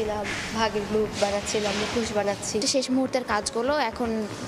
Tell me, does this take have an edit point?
yes; 1 cut; at 2.7 s

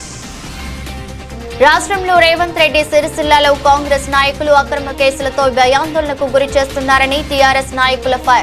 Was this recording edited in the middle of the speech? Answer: yes; 1 cut; at 1.6 s

